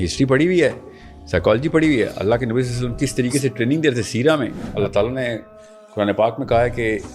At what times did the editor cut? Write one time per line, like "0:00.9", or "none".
0:04.6

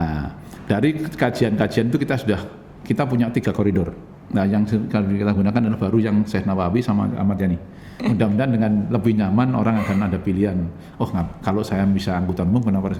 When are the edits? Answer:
0:08.0

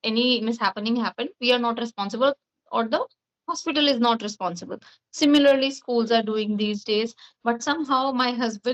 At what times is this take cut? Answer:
none

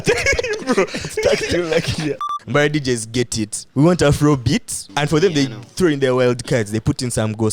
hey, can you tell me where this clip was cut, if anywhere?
0:02.2
0:03.6
0:04.8

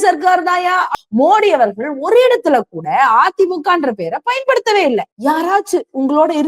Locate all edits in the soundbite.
0:01.0
0:05.1

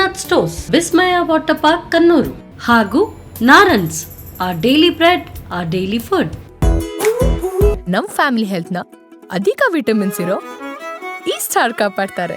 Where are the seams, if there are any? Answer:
0:06.4

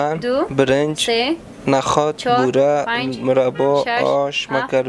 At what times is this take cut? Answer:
none

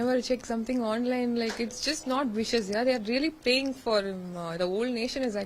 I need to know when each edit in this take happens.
none

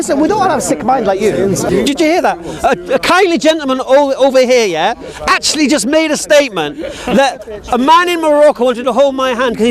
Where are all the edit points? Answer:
0:01.7

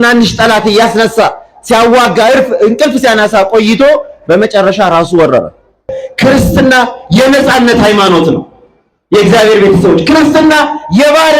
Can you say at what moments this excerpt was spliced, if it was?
0:06.0

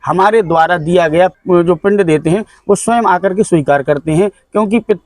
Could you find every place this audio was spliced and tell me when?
0:01.3

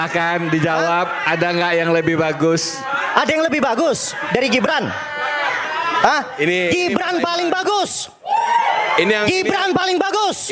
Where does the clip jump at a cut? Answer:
none

